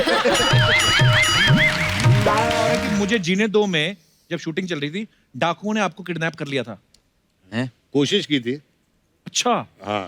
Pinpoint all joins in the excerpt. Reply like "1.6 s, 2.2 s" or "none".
2.8 s